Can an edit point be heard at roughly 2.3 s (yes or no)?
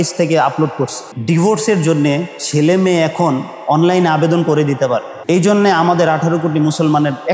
no